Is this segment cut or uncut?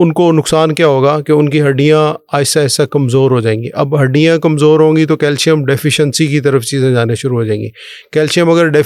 uncut